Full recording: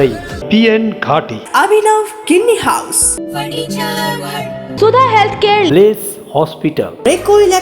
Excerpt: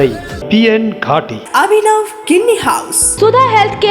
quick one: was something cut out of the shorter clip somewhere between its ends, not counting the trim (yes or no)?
yes